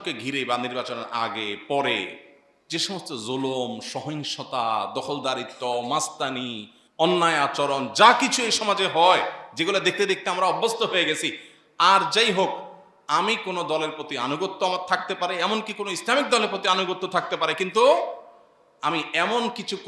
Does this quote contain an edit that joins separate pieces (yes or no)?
no